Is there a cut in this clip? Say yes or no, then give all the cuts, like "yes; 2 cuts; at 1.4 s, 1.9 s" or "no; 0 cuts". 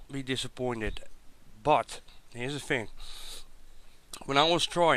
no; 0 cuts